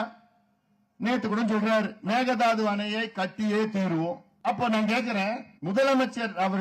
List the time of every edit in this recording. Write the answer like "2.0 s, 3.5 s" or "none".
2.0 s, 4.3 s, 5.5 s